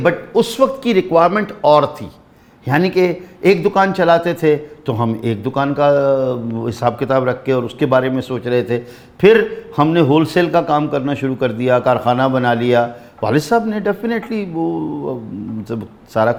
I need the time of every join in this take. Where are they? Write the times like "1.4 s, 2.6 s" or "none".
none